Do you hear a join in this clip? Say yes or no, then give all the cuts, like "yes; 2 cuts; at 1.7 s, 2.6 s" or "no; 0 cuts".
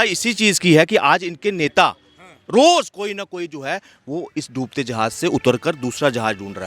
no; 0 cuts